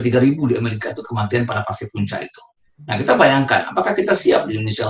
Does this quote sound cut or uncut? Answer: uncut